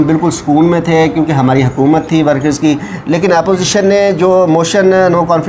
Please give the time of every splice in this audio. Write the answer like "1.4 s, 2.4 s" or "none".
none